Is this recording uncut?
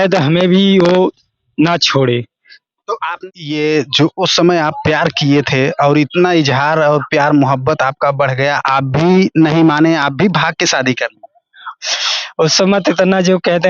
no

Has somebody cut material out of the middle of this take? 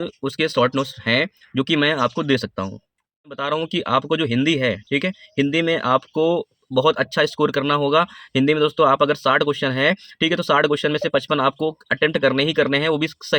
yes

